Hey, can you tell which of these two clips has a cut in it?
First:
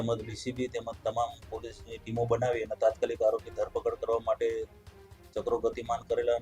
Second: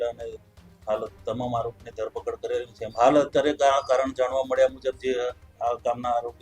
second; 1 cut; at 2.8 s

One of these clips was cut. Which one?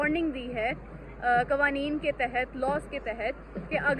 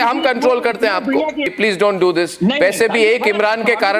second; 1 cut; at 1.4 s

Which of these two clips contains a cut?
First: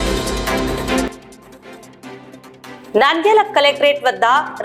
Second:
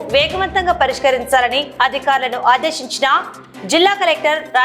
first; 2 cuts; at 1.1 s, 2.9 s

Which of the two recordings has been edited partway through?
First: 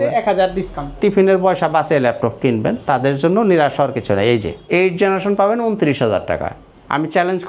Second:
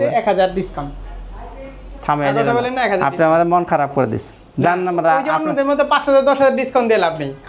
first; 2 cuts; at 0.9 s, 4.5 s

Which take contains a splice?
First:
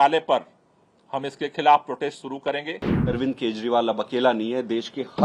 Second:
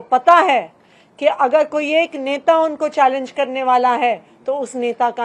first; 1 cut; at 2.9 s

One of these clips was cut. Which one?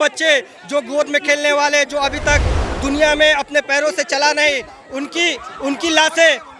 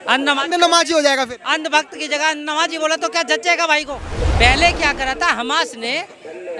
second; 1 cut; at 4.1 s

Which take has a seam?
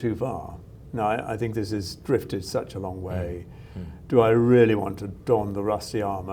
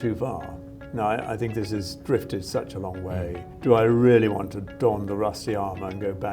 second; 1 cut; at 3.5 s

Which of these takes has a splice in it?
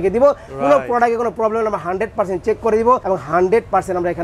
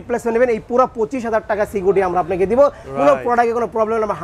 first; 1 cut; at 3.0 s

